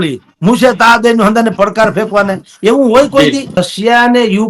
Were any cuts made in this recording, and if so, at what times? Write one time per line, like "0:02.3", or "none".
0:03.6